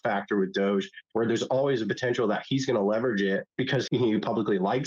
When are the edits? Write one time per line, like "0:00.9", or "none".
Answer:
0:03.6